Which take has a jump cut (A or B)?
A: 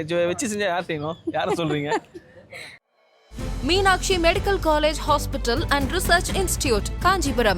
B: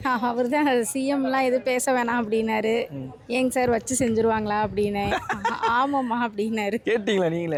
A